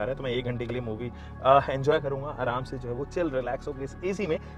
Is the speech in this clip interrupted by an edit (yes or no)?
no